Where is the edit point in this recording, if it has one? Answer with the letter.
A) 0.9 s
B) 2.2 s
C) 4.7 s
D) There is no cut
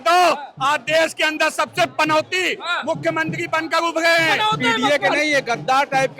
C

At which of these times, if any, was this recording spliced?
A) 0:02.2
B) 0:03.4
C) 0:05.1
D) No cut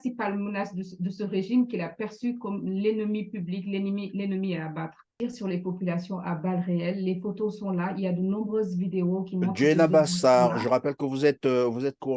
C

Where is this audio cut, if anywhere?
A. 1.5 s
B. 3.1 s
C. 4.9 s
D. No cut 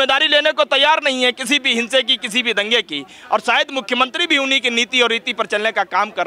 D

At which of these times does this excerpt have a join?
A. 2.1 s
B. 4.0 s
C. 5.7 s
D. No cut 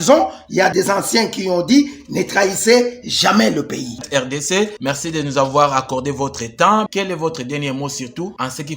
B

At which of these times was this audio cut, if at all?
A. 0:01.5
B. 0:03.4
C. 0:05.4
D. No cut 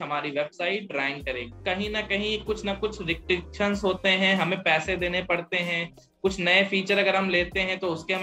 A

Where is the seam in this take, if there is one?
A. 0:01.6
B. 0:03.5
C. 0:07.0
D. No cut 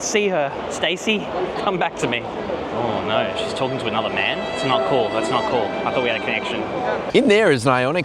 C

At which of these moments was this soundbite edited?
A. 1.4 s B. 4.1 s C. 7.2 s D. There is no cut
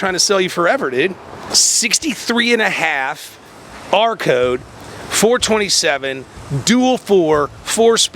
A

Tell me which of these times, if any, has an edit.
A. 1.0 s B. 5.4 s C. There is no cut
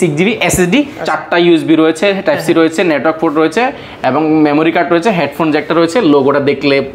A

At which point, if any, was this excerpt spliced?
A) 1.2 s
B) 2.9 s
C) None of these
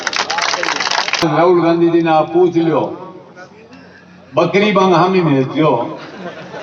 A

